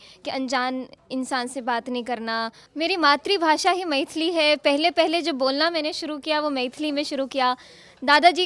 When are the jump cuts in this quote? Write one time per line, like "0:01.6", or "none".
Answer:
0:02.6